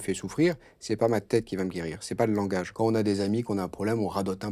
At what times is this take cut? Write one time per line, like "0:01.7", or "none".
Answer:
0:02.7